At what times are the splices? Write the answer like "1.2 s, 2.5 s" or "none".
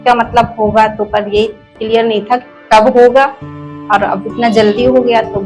none